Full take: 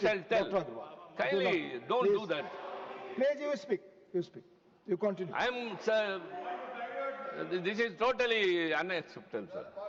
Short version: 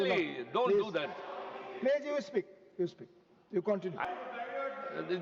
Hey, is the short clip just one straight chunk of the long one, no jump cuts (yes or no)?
no